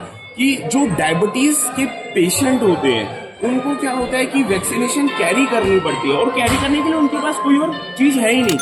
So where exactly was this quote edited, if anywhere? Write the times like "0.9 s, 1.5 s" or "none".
none

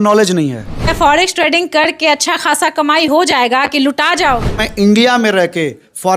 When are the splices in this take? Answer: 0.9 s, 4.7 s

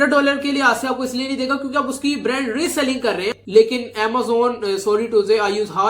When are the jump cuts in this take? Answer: 3.3 s

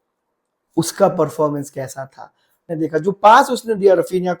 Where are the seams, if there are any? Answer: 2.7 s

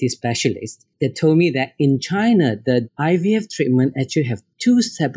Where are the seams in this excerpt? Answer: 0.9 s

